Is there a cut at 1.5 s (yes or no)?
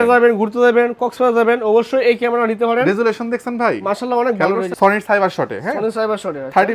no